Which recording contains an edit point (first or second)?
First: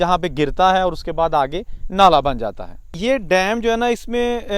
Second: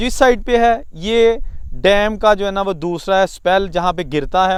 first